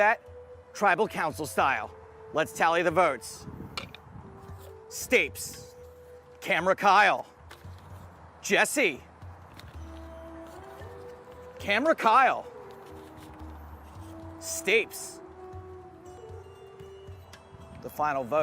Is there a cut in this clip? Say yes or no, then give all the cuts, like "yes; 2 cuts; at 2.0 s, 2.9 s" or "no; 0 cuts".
yes; 1 cut; at 16.2 s